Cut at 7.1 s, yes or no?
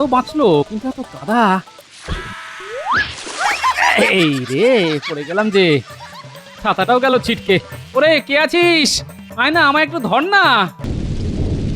no